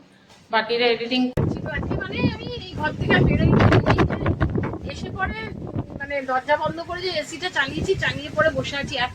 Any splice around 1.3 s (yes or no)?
yes